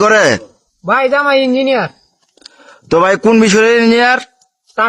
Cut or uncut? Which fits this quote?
uncut